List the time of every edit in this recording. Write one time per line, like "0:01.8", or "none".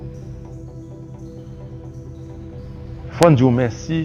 none

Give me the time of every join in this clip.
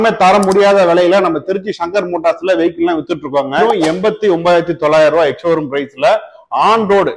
0:03.6

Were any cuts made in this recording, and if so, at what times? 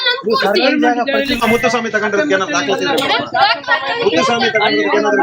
0:01.4

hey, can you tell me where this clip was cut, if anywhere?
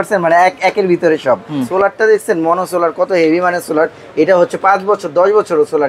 0:01.7

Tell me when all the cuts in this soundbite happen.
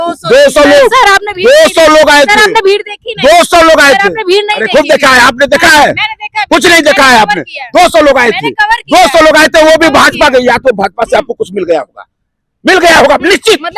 none

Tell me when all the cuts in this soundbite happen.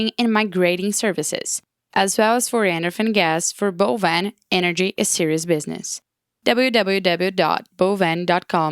none

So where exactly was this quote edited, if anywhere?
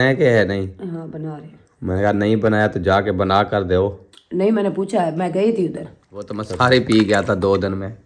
0:06.4

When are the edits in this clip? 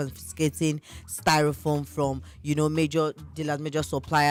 none

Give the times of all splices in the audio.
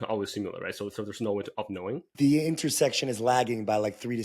0:02.1

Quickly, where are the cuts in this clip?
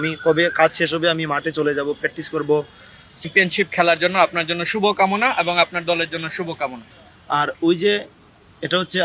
0:03.2
0:06.8

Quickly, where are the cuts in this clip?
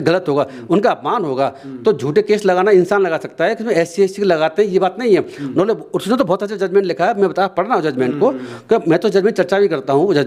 none

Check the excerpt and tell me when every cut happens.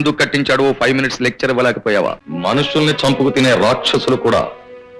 0:02.2

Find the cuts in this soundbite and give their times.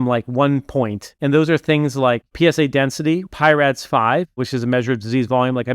0:01.1
0:02.3
0:03.3
0:04.4

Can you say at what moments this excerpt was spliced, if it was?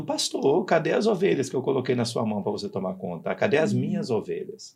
none

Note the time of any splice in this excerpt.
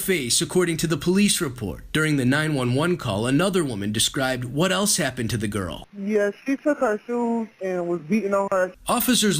0:02.8

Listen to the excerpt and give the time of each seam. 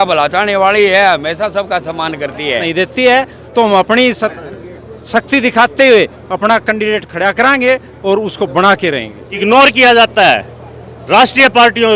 0:02.6
0:09.2

